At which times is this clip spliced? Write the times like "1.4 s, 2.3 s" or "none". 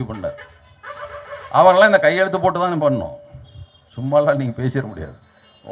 none